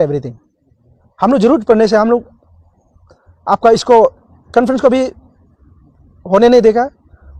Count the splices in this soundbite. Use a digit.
0